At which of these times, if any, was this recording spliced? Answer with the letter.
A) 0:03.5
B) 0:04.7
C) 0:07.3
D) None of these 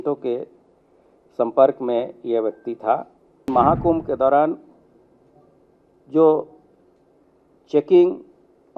A